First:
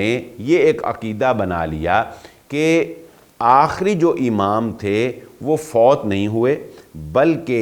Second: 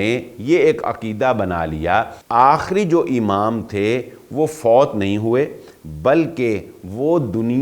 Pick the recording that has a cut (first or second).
second